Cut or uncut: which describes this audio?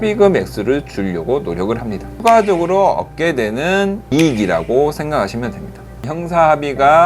cut